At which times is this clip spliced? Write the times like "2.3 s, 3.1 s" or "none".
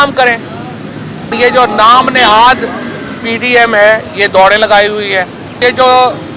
1.3 s, 5.6 s